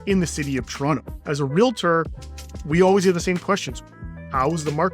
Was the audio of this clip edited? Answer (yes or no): yes